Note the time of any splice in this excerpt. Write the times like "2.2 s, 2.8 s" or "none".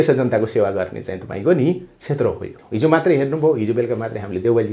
2.5 s

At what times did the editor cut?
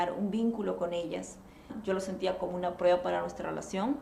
1.7 s

